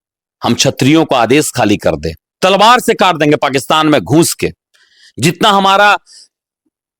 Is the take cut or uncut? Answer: uncut